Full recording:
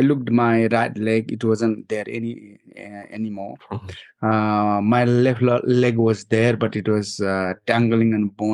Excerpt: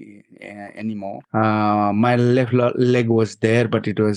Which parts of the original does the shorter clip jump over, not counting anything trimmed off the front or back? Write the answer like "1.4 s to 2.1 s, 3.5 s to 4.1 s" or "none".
3.6 s to 4.1 s